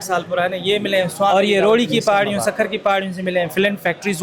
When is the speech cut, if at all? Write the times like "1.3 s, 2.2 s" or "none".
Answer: 1.3 s